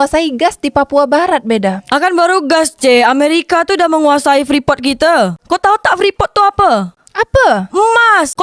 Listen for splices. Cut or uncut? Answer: cut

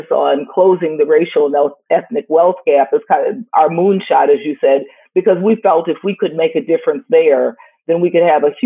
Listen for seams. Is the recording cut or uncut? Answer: uncut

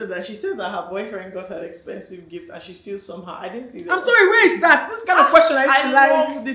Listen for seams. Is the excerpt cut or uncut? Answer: uncut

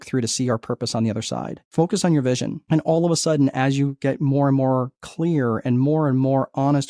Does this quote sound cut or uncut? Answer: cut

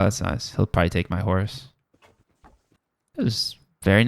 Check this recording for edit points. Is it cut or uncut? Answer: cut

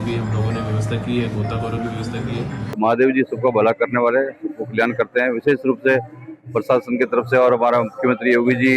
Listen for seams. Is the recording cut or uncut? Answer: cut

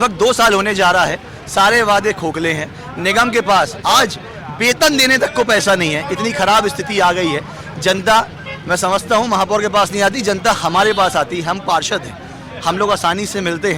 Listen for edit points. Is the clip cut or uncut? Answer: uncut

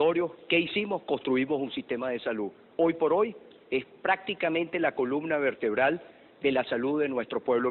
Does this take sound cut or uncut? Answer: uncut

